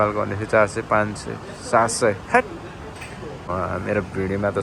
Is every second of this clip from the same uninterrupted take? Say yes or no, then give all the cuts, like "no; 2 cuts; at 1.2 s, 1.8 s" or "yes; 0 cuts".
no; 1 cut; at 3.5 s